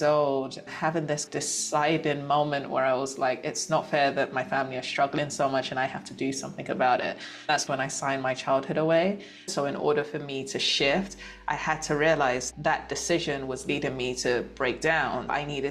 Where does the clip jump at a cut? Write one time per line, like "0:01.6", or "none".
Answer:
0:09.5